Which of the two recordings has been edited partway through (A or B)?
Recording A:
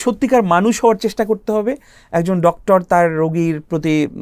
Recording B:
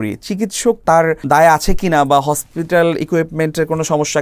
B